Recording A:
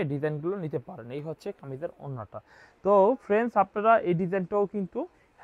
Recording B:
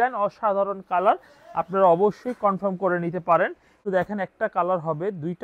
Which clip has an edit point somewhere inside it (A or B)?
B